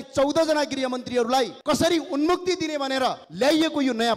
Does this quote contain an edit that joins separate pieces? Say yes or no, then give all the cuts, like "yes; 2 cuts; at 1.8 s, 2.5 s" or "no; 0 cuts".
yes; 2 cuts; at 1.6 s, 3.2 s